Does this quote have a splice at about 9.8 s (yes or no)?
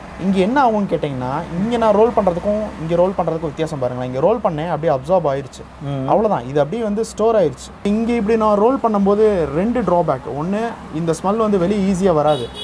no